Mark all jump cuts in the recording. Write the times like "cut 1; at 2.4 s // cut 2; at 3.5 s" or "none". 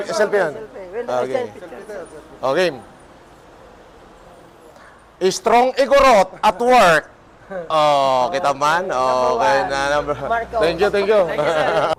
none